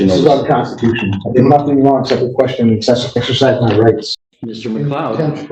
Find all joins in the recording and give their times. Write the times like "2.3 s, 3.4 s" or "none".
4.1 s

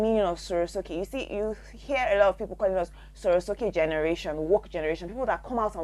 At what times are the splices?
none

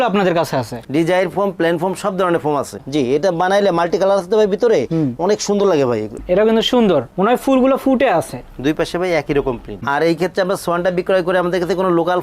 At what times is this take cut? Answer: 2.8 s, 6.1 s, 9.9 s

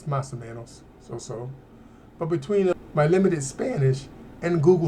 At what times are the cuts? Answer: 2.7 s

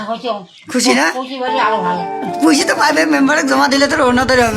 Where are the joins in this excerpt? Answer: none

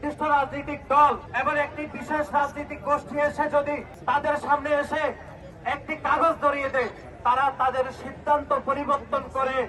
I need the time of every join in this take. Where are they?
1.3 s, 3.9 s

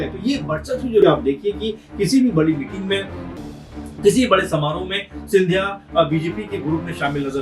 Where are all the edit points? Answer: 1.0 s

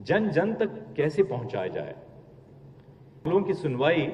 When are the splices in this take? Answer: 3.2 s

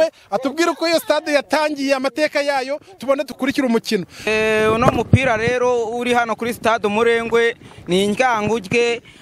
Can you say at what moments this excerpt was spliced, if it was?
4.3 s

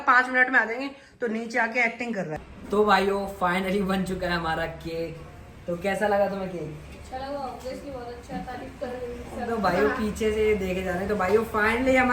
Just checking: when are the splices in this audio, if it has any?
2.6 s

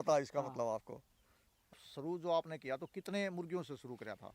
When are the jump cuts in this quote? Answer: 1.8 s

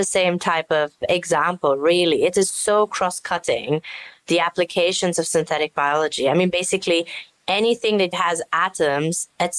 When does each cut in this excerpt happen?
8.2 s

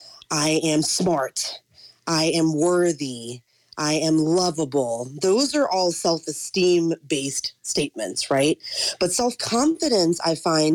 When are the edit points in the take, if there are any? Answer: none

